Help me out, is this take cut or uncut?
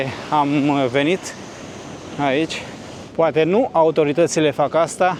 uncut